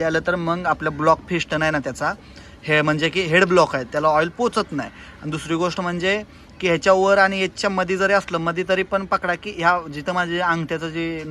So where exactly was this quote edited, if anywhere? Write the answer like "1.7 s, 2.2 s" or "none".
none